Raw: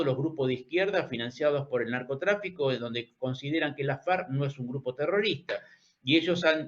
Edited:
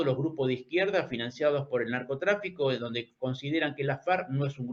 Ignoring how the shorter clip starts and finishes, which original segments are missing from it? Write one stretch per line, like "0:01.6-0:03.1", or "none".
none